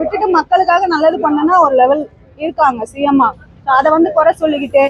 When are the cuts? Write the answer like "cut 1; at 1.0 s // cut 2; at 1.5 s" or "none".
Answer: none